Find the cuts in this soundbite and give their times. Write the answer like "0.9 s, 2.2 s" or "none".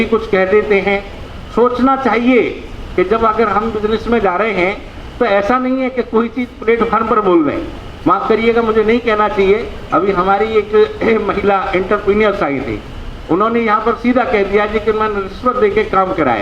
none